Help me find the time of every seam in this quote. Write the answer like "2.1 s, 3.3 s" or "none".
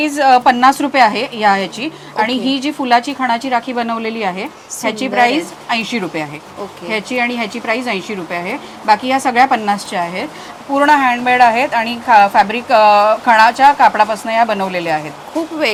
none